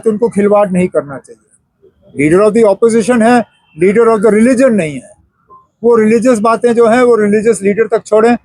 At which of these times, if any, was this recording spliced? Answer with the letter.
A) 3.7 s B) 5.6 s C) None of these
C